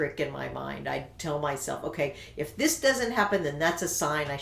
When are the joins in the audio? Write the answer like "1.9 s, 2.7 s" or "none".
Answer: none